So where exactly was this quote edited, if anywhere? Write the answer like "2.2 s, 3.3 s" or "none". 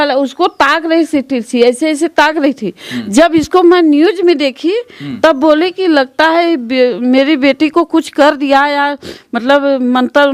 none